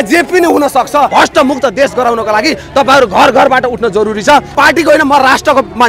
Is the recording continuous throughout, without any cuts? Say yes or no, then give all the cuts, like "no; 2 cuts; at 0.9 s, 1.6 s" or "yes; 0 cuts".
no; 2 cuts; at 1.1 s, 4.5 s